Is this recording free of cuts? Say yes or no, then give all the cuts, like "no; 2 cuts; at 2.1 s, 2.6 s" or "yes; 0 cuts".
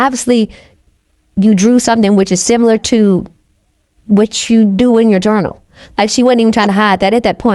yes; 0 cuts